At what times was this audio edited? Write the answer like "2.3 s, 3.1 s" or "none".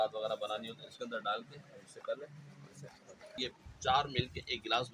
3.3 s